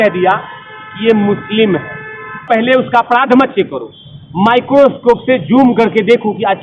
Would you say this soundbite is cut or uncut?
cut